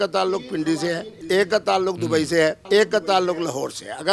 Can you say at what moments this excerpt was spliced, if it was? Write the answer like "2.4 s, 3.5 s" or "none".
1.1 s, 2.6 s